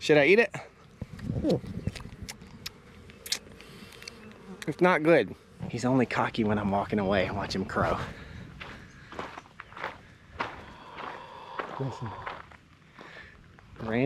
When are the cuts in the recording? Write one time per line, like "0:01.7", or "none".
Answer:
0:05.6